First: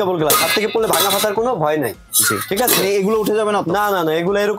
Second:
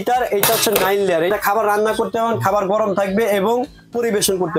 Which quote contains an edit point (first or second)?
second